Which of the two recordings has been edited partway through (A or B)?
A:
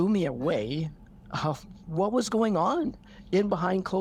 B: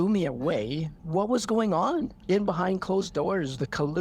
B